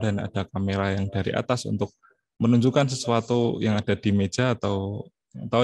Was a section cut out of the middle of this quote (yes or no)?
no